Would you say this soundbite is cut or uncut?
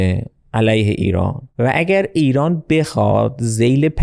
cut